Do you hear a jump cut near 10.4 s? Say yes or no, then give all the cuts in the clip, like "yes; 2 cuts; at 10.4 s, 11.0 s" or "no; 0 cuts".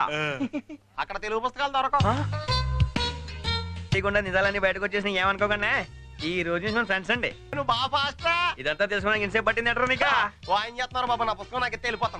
no; 2 cuts; at 3.9 s, 7.6 s